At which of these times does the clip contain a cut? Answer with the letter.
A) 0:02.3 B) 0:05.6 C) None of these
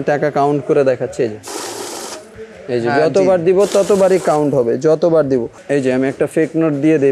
B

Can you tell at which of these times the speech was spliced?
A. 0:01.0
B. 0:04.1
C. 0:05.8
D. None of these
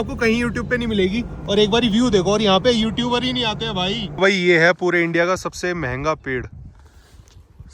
B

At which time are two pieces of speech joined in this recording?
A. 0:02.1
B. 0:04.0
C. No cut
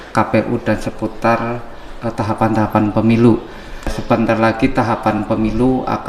B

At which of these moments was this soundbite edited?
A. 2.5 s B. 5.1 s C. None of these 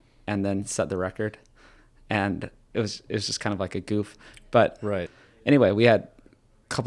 B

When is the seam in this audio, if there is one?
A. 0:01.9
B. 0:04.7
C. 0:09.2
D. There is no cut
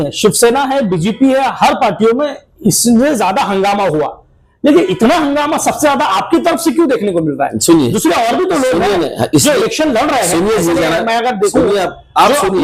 D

